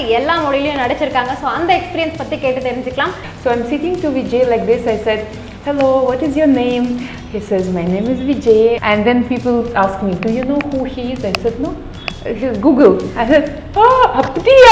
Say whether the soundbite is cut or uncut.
cut